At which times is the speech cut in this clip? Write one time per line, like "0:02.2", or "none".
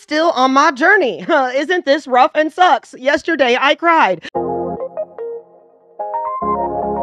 0:04.2